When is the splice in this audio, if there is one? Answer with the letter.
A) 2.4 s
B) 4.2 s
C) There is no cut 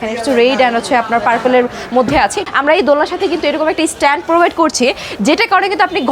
A